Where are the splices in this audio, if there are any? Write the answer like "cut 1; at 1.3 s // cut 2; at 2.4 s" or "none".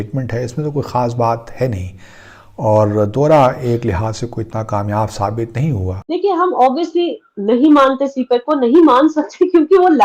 cut 1; at 6.0 s